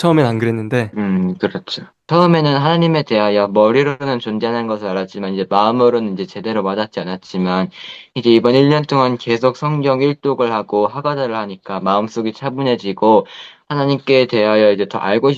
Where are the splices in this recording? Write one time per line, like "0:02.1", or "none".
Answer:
0:00.9
0:01.9